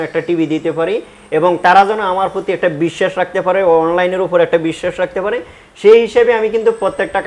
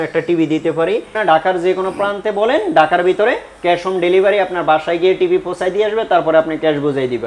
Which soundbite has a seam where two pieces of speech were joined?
second; 1 cut; at 1.2 s

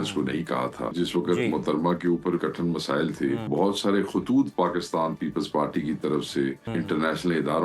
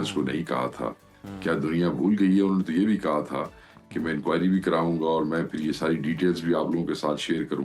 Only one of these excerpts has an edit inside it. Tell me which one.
first; 4 cuts; at 0.9 s, 2.4 s, 3.5 s, 6.6 s

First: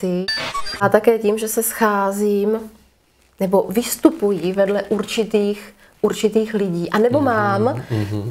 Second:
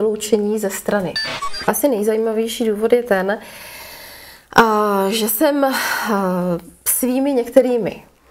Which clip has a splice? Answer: second; 1 cut; at 1.7 s

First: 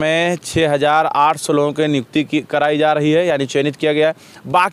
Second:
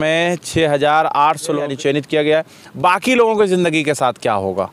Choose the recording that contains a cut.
second; 1 cut; at 1.7 s

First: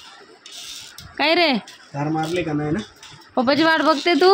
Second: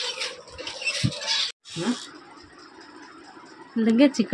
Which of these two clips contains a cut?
second; 1 cut; at 1.4 s

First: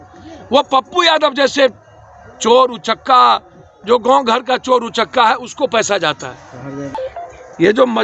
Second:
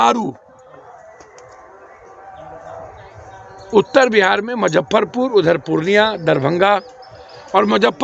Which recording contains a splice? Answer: first; 1 cut; at 7.0 s

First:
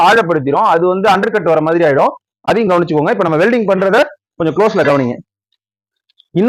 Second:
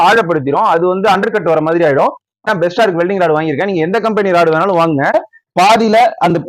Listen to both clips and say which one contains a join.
second; 2 cuts; at 2.4 s, 5.1 s

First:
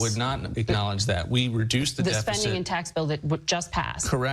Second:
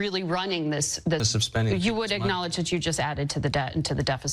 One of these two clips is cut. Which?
second; 1 cut; at 1.3 s

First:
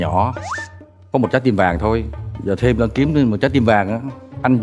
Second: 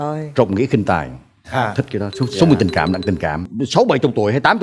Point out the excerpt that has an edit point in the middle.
second; 1 cut; at 3.4 s

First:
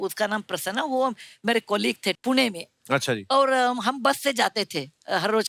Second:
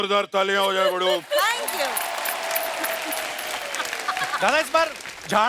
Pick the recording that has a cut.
second; 1 cut; at 4.1 s

